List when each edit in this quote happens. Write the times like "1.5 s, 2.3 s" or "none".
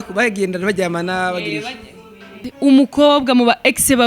2.5 s